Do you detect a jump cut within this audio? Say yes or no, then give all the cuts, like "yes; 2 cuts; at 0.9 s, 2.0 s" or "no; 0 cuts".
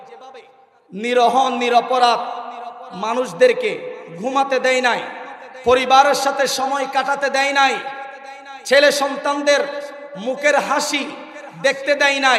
no; 0 cuts